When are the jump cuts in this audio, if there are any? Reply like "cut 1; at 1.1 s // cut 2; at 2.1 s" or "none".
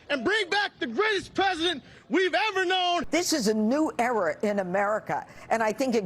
cut 1; at 3.1 s